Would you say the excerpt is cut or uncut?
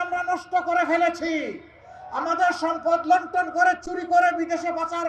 uncut